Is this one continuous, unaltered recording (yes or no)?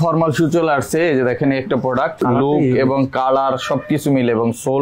no